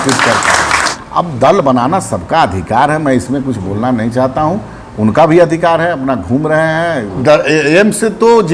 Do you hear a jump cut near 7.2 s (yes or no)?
yes